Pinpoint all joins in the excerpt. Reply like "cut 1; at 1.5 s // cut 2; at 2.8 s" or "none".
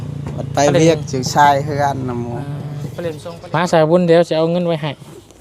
cut 1; at 3.2 s